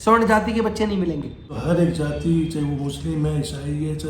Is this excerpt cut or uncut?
cut